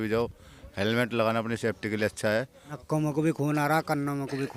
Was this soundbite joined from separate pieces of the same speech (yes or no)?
yes